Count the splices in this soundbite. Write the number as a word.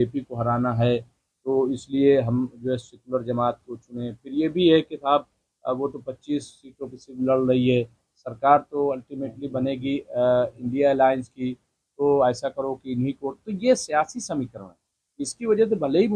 zero